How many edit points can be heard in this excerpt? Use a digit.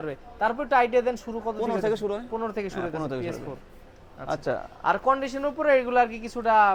0